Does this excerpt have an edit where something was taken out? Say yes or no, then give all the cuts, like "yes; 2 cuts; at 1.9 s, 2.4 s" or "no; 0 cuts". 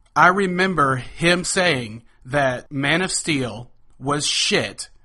yes; 1 cut; at 2.6 s